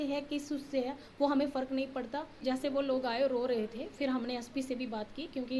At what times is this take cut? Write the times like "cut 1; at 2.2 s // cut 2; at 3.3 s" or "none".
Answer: cut 1; at 2.4 s